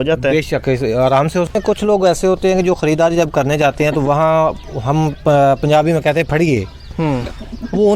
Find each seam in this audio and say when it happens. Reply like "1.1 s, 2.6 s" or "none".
1.5 s